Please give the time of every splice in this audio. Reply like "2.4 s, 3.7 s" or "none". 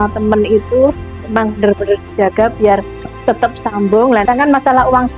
4.3 s